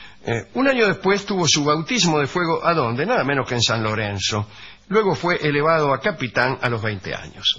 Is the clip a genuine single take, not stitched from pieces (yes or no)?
yes